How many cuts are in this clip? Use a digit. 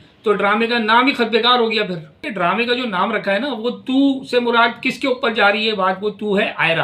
1